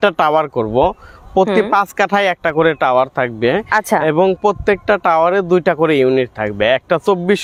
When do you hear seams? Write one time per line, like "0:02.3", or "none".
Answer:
none